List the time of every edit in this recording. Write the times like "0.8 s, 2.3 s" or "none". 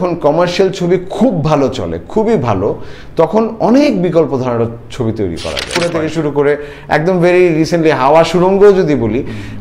5.7 s